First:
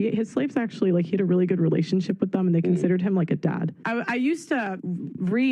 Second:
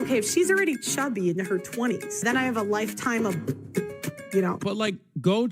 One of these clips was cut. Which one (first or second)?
second